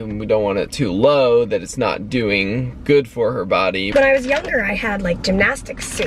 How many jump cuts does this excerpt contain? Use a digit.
1